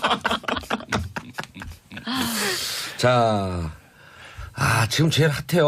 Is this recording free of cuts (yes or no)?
no